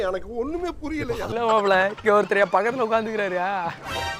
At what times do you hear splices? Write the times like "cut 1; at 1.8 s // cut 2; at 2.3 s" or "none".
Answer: cut 1; at 1.3 s